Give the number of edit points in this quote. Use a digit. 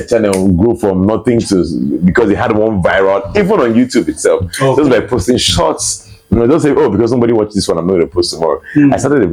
0